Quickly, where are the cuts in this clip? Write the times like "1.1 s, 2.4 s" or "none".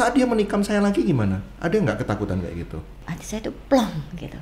3.0 s